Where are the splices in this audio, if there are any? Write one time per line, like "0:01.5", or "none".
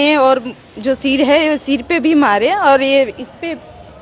none